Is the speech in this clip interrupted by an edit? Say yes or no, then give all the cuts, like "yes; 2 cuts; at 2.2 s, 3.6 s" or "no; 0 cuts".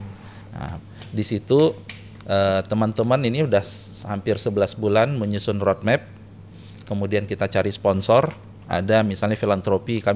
no; 0 cuts